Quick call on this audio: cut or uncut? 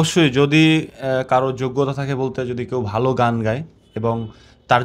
uncut